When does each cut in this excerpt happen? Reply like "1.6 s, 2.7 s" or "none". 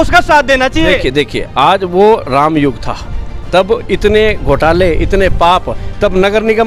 none

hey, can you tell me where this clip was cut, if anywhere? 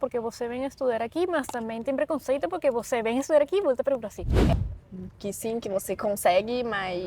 4.5 s

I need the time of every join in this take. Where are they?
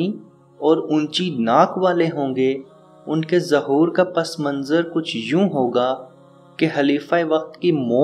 none

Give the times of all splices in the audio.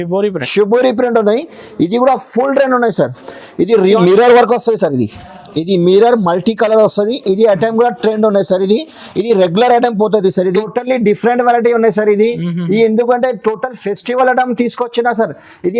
4.0 s, 10.6 s

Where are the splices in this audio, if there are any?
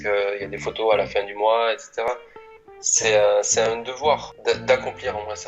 4.3 s

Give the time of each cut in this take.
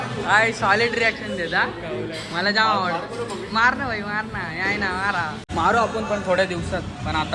5.4 s

